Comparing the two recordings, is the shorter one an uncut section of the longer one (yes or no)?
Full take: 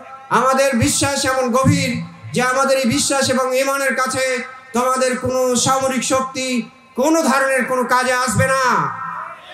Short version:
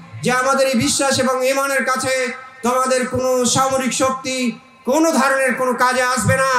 yes